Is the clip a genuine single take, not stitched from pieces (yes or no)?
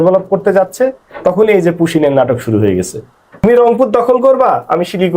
no